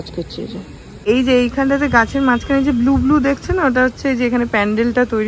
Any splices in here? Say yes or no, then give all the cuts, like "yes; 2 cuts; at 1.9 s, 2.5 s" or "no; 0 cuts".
yes; 1 cut; at 1.0 s